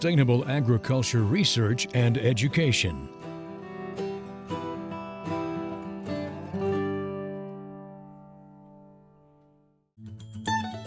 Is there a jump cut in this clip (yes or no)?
yes